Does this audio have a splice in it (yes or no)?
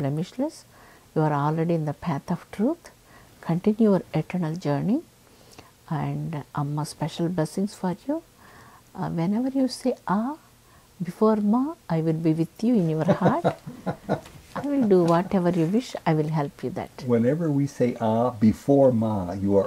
no